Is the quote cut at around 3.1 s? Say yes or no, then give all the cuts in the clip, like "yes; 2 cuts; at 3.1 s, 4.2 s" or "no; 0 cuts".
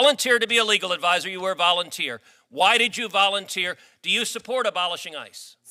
no; 0 cuts